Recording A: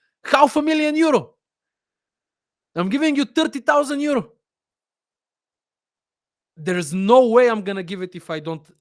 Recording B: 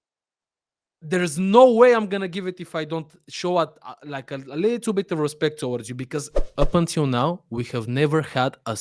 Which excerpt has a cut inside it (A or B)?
B